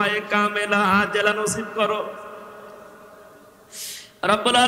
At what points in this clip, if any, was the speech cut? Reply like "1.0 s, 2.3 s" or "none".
none